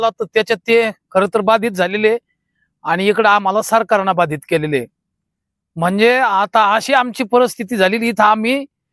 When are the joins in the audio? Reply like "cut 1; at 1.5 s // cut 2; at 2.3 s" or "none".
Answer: none